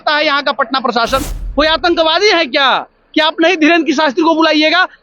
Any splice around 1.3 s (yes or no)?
yes